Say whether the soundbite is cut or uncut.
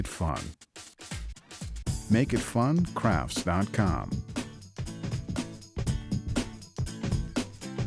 cut